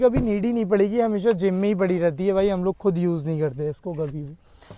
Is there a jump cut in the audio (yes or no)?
no